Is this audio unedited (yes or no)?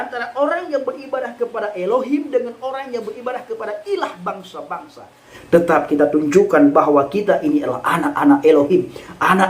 no